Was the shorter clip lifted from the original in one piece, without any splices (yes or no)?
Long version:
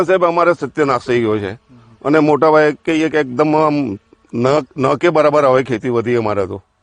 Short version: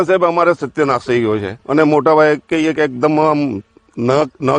no